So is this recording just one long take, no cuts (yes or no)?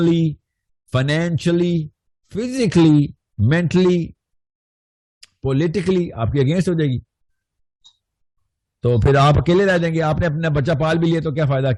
yes